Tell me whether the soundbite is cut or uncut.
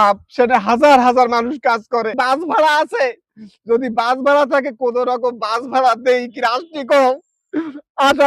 cut